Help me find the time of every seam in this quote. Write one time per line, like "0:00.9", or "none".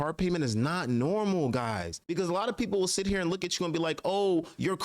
0:01.9